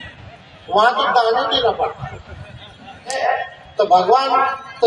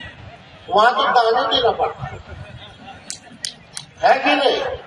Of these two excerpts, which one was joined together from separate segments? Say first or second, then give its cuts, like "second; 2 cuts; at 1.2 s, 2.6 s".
first; 1 cut; at 3.2 s